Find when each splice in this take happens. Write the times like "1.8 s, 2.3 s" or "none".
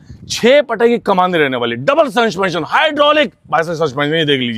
none